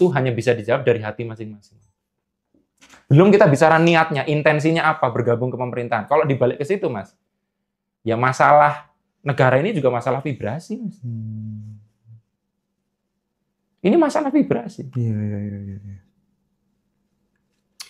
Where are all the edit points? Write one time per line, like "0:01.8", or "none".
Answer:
none